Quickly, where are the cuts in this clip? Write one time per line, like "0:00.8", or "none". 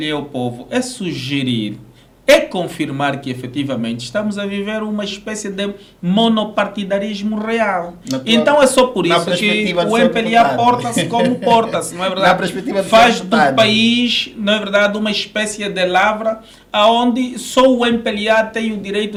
none

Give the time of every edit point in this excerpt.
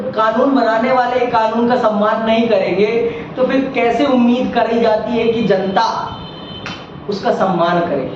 none

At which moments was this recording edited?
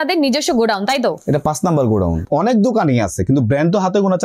0:02.2

